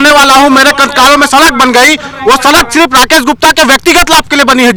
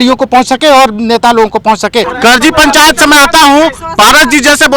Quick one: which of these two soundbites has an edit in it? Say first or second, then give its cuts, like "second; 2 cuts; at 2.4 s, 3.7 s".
second; 1 cut; at 2.1 s